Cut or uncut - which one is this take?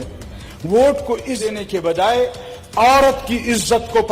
cut